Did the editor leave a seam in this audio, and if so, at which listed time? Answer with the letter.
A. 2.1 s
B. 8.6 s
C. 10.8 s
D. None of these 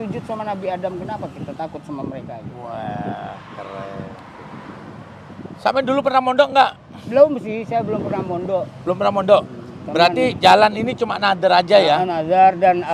D